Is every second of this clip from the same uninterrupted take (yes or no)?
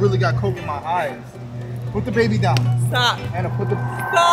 yes